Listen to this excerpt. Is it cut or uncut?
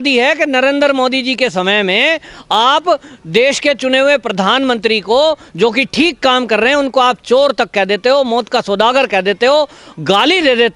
uncut